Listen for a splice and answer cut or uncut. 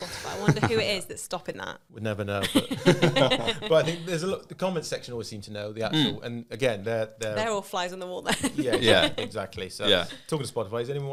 uncut